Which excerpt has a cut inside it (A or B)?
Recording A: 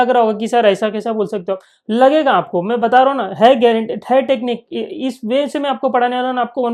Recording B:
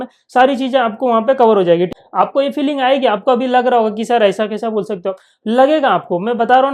B